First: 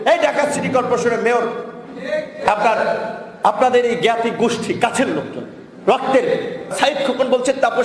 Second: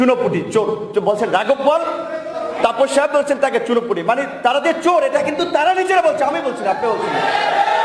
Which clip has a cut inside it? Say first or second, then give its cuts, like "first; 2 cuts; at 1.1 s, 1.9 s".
first; 1 cut; at 6.7 s